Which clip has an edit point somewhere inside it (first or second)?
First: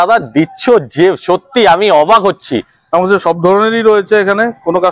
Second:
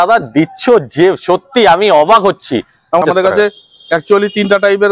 second